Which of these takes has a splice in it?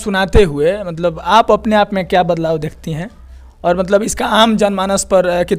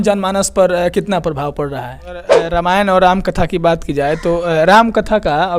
second; 1 cut; at 2.4 s

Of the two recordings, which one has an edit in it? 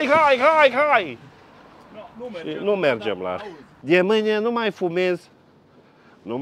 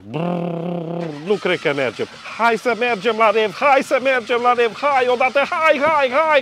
first; 1 cut; at 3.7 s

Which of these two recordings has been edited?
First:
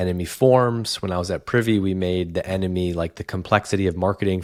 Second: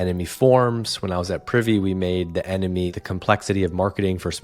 second; 1 cut; at 2.9 s

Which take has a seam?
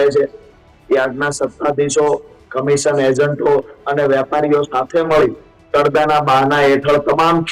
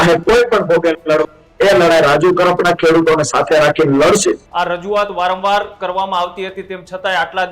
second; 1 cut; at 4.5 s

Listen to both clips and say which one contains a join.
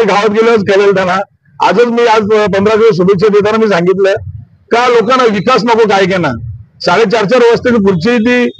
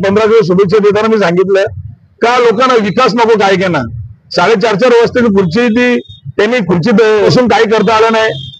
second; 1 cut; at 7.3 s

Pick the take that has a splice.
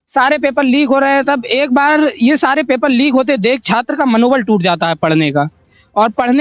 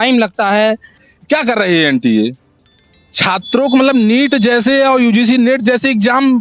second; 1 cut; at 1.1 s

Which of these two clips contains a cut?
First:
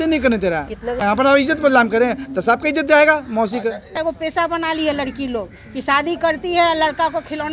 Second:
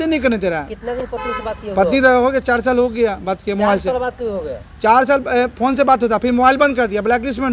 first; 2 cuts; at 1.0 s, 3.9 s

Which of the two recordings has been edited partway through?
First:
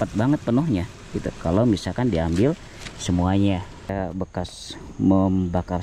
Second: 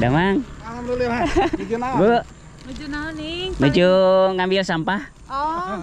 first; 1 cut; at 3.9 s

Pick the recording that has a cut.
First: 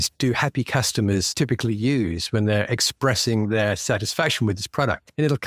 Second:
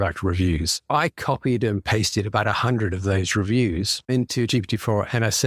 second; 1 cut; at 4.1 s

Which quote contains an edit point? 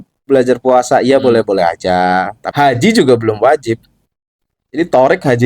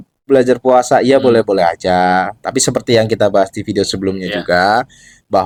first; 1 cut; at 2.4 s

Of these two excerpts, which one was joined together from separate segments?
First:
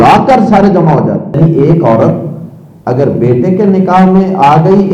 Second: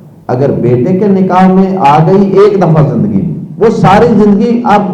first; 1 cut; at 1.4 s

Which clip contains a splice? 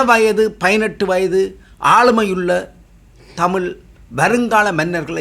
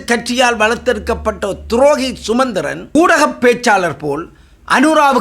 second; 1 cut; at 2.9 s

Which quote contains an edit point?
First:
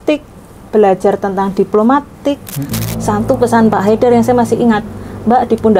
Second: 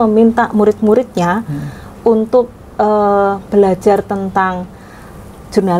first; 1 cut; at 2.8 s

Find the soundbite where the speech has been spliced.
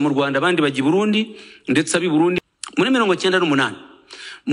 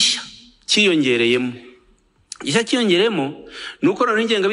first; 1 cut; at 2.4 s

